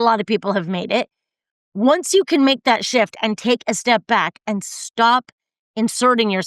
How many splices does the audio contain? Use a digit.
0